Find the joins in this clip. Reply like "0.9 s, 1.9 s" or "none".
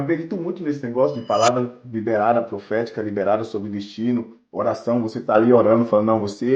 none